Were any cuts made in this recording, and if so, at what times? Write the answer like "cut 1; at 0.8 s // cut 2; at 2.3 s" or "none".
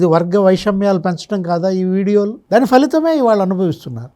cut 1; at 2.4 s